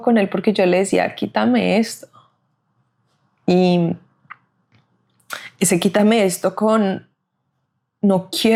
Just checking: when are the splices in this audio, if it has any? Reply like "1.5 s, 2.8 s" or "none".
none

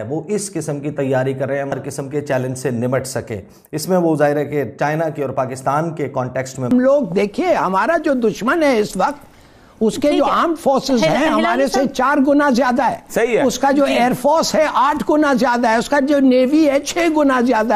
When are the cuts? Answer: 1.7 s, 6.6 s

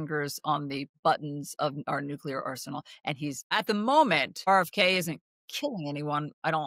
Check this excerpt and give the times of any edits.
0.9 s, 3.5 s, 4.4 s

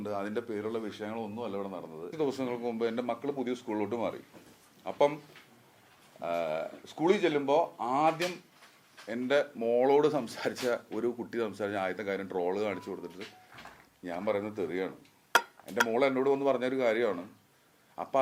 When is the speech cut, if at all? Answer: 2.1 s

